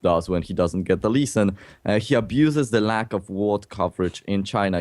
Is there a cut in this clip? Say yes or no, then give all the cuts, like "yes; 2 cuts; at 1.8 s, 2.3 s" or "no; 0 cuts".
yes; 1 cut; at 1.8 s